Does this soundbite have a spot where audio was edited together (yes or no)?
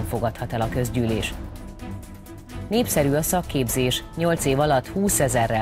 no